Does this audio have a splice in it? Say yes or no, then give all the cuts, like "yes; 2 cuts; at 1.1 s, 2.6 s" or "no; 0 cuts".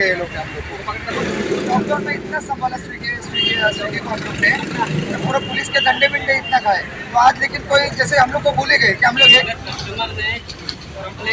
yes; 2 cuts; at 1.2 s, 9.5 s